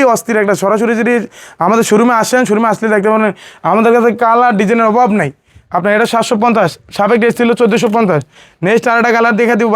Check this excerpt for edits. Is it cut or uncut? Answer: uncut